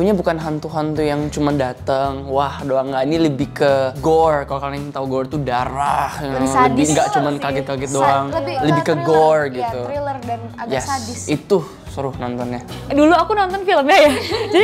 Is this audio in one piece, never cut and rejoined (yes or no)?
yes